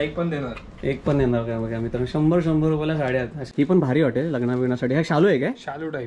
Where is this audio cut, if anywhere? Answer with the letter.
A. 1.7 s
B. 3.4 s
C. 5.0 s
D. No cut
B